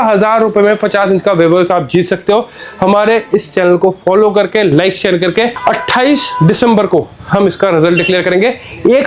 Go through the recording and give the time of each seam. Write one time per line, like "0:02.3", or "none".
none